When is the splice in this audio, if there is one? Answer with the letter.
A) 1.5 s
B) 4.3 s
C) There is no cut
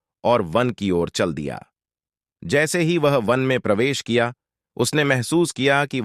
C